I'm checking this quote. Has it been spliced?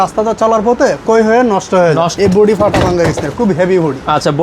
yes; 1 cut; at 2.1 s

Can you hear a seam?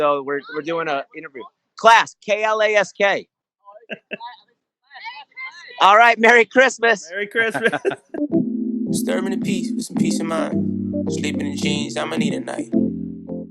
yes; 1 cut; at 8.1 s

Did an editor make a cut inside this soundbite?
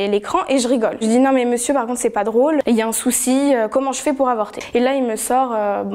yes; 3 cuts; at 1.0 s, 2.6 s, 4.7 s

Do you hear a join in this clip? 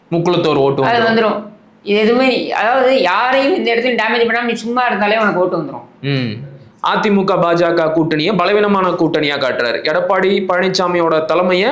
yes; 1 cut; at 6.6 s

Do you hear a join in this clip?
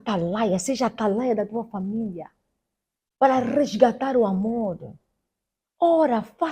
no; 0 cuts

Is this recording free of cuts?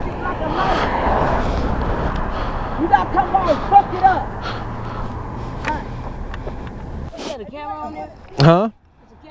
no; 1 cut; at 7.1 s

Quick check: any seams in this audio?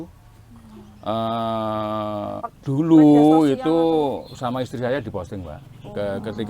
yes; 1 cut; at 2.5 s

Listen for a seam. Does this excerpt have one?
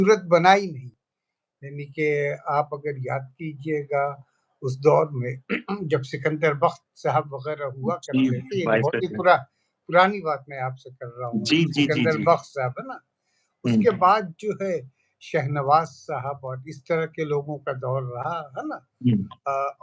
no; 0 cuts

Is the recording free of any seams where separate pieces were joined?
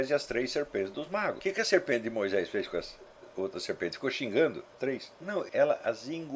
no; 2 cuts; at 1.4 s, 5.2 s

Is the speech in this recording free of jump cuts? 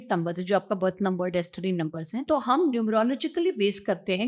no; 1 cut; at 2.2 s

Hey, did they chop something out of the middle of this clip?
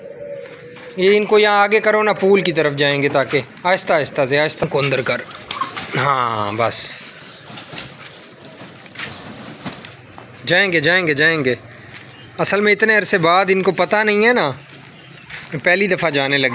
yes; 1 cut; at 4.6 s

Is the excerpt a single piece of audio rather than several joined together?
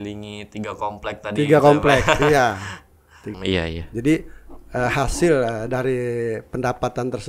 no; 1 cut; at 3.2 s

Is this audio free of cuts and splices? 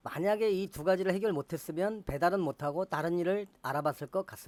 yes; 0 cuts

